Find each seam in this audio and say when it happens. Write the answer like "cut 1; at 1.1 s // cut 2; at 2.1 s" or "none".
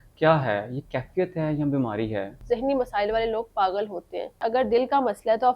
cut 1; at 2.4 s // cut 2; at 4.4 s

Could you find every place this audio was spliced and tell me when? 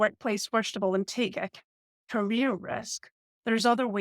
none

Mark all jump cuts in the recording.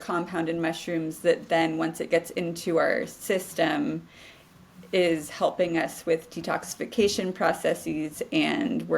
none

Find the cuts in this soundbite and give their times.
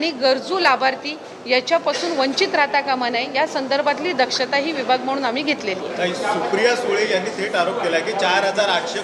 none

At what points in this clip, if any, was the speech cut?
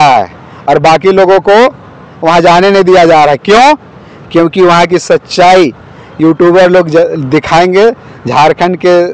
none

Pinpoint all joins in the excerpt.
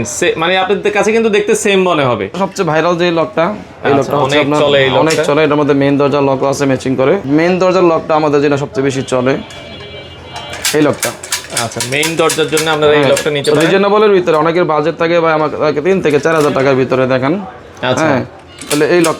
cut 1; at 2.3 s // cut 2; at 7.2 s

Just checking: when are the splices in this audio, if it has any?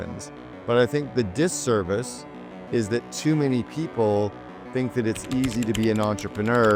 none

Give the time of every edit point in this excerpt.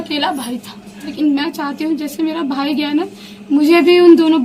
cut 1; at 1.1 s

